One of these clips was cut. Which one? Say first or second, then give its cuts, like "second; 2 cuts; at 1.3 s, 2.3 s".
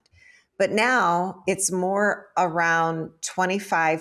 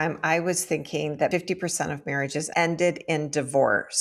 second; 2 cuts; at 1.3 s, 2.5 s